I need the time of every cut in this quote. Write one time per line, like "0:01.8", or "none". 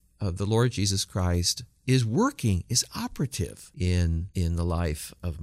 0:03.6
0:04.3